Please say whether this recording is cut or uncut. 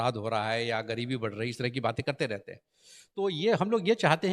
uncut